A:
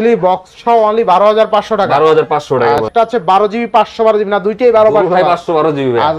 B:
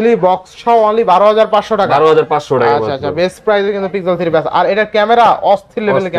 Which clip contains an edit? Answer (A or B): A